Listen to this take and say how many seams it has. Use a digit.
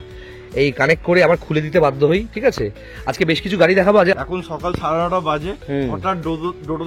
1